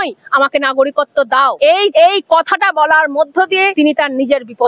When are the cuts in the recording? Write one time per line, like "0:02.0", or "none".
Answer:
0:01.8
0:03.7